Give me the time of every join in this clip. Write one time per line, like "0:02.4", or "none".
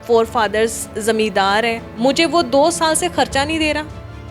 0:01.9